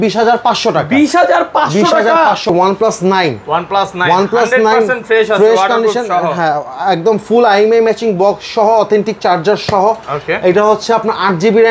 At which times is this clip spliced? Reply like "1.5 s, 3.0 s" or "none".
2.5 s